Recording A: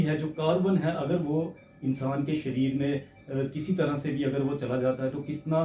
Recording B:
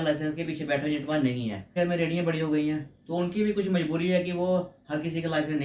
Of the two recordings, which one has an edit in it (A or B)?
B